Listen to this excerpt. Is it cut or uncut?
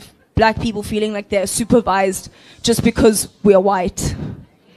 uncut